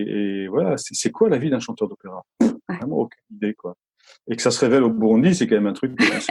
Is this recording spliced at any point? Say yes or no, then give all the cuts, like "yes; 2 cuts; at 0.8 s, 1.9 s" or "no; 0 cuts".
no; 0 cuts